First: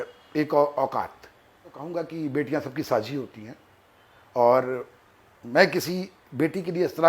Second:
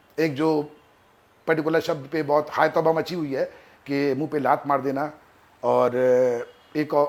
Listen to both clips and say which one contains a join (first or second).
first